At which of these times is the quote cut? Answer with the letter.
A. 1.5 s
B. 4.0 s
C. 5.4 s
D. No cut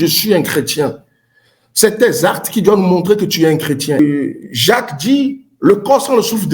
B